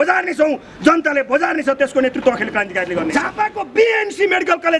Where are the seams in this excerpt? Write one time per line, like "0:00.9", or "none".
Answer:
0:03.1